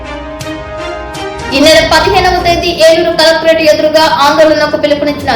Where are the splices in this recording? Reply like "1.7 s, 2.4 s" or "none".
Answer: 1.4 s